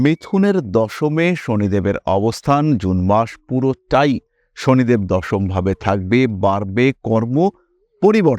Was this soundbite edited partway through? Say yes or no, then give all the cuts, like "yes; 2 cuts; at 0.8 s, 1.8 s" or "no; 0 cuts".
no; 0 cuts